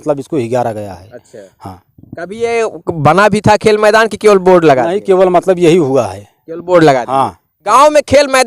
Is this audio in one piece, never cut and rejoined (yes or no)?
no